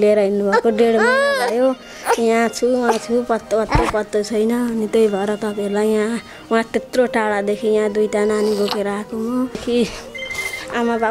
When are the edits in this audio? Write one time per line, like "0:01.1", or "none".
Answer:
0:09.6

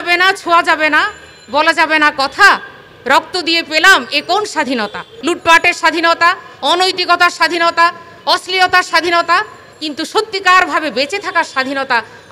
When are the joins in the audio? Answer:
0:05.1

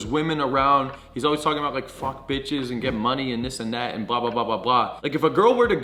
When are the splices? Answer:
none

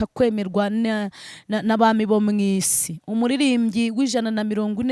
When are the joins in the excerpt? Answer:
none

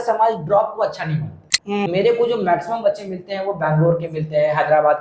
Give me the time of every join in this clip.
0:01.6

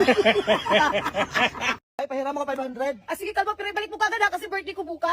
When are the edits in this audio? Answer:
0:01.7

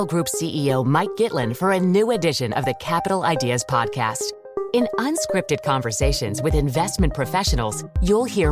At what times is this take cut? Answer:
none

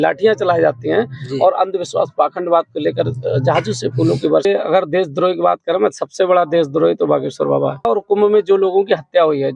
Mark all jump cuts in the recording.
0:04.5
0:07.9

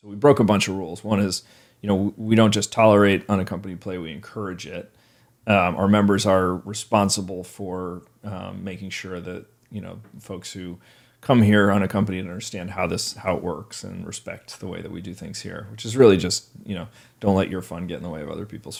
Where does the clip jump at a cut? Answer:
none

